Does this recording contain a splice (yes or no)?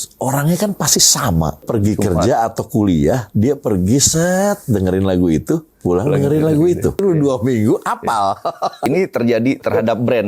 yes